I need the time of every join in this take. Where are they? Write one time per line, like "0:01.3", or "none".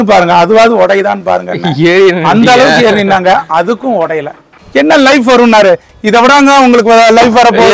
0:04.5